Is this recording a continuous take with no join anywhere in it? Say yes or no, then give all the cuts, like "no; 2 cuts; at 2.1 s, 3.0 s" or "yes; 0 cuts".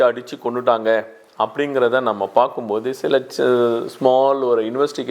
yes; 0 cuts